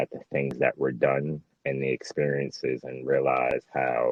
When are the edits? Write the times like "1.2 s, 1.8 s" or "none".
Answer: none